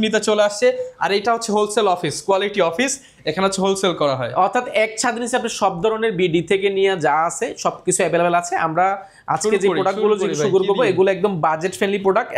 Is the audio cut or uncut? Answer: uncut